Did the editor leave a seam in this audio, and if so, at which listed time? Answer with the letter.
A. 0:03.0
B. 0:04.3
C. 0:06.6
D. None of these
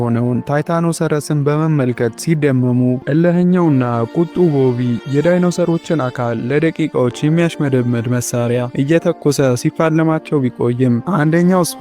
A